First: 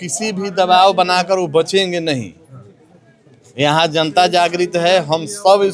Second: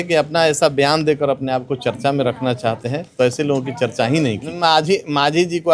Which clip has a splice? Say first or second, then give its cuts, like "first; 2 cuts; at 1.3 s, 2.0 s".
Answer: second; 1 cut; at 4.6 s